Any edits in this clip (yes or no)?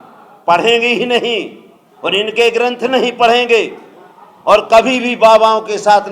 no